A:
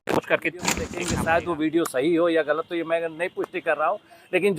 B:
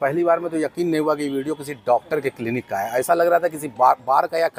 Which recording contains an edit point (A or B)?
A